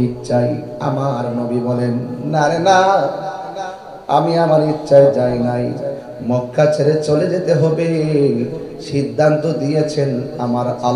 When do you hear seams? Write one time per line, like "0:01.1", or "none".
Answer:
none